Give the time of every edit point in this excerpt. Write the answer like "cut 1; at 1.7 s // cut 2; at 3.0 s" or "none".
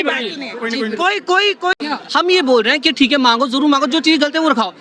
cut 1; at 1.8 s